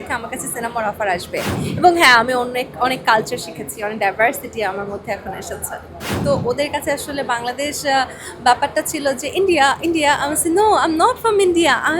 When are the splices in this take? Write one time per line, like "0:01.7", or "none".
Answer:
0:01.7
0:06.2